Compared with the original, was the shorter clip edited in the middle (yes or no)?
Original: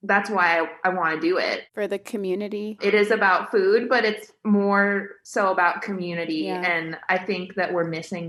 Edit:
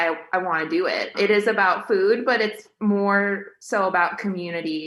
yes